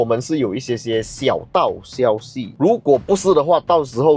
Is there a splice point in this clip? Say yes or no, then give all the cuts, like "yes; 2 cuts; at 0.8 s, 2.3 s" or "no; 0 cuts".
yes; 1 cut; at 2.5 s